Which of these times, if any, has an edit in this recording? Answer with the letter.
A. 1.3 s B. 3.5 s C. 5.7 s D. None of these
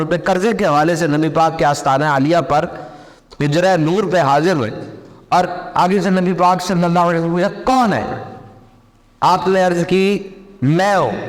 D